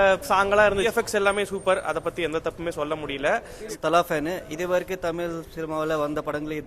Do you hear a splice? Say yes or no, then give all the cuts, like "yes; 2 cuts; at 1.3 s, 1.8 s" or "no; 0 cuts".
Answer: yes; 2 cuts; at 0.9 s, 3.8 s